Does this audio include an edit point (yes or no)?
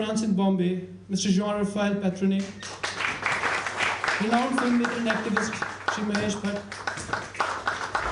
yes